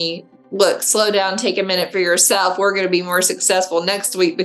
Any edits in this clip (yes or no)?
no